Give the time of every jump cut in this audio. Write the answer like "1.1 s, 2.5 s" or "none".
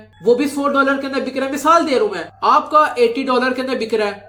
none